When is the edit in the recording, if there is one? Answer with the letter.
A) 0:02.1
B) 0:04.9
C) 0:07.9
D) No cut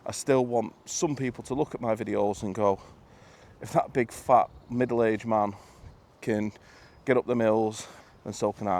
C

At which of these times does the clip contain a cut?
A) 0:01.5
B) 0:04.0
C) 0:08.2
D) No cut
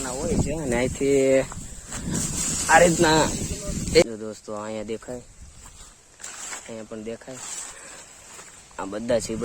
B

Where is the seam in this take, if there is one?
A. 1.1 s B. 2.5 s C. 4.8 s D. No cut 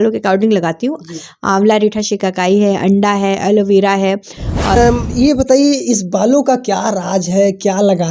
C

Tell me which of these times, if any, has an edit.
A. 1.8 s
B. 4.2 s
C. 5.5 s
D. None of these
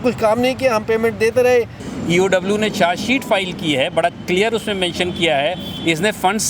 A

